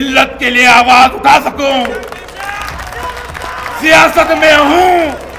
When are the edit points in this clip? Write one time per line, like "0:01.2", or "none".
none